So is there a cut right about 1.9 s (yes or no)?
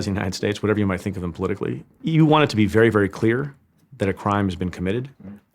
yes